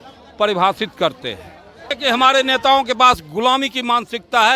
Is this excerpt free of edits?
no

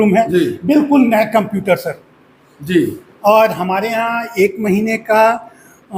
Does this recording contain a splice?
no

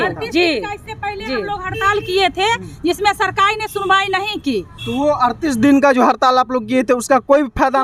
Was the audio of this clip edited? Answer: no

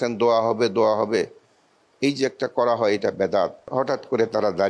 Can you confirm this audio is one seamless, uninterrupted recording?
no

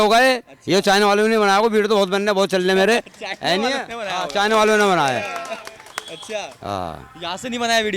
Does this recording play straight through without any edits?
yes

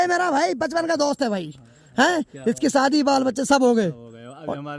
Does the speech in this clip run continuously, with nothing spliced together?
yes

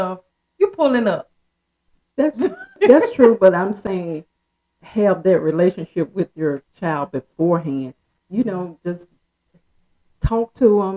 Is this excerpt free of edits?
yes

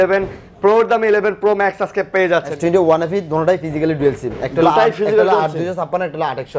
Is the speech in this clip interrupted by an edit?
yes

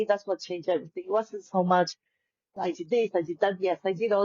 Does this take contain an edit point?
yes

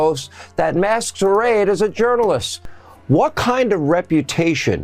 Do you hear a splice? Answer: yes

